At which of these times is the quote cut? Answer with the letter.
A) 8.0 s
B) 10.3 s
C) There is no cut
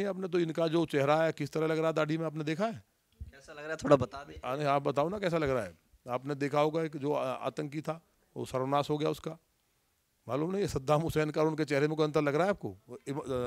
C